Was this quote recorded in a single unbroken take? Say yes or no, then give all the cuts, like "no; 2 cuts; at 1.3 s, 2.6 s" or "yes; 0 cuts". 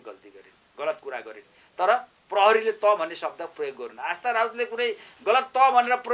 yes; 0 cuts